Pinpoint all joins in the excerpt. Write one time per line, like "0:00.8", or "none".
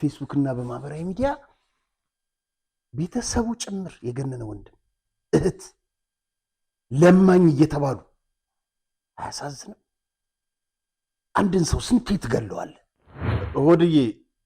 0:13.4